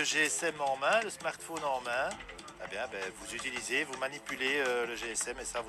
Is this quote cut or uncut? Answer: uncut